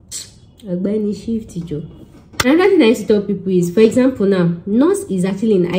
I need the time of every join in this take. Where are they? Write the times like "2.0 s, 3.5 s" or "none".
2.5 s